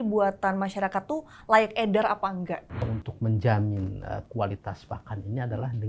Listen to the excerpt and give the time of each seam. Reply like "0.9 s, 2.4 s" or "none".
2.6 s